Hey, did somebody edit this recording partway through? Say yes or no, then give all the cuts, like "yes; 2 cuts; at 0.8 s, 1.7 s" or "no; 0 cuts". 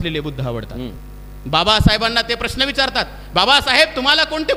no; 0 cuts